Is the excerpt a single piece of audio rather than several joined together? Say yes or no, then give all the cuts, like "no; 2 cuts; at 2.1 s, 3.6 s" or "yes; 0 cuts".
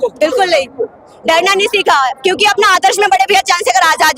yes; 0 cuts